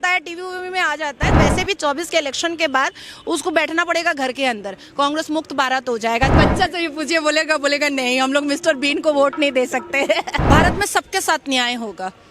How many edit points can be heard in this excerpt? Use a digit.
3